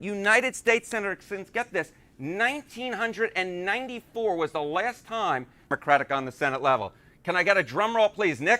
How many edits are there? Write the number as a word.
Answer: one